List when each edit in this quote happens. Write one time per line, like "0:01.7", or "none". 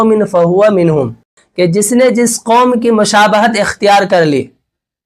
0:01.4